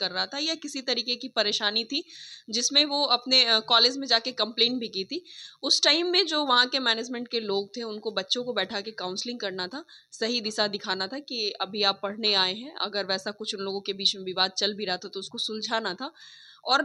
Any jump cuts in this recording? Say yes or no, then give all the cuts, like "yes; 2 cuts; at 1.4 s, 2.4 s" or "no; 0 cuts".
no; 0 cuts